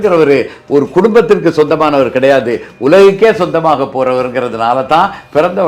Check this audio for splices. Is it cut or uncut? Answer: uncut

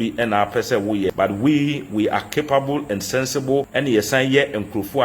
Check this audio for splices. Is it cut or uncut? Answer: cut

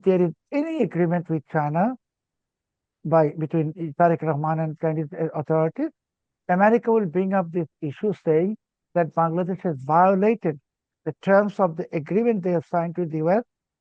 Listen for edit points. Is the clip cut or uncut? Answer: uncut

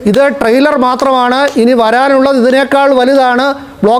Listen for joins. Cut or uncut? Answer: uncut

